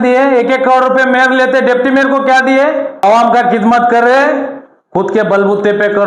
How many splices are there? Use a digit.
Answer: 1